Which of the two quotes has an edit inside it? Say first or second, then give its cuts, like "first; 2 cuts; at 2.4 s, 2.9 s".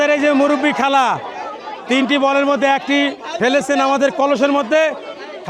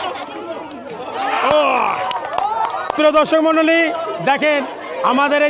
second; 1 cut; at 3.0 s